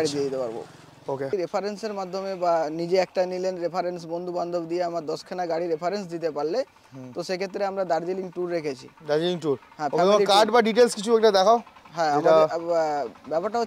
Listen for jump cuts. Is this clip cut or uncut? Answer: cut